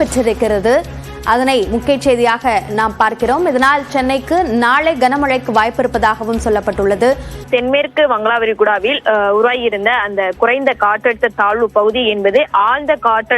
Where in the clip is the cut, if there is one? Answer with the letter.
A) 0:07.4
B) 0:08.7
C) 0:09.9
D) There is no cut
A